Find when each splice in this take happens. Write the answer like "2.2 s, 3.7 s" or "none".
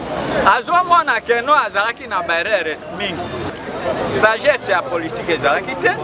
3.5 s